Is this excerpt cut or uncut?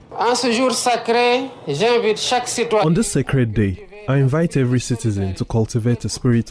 uncut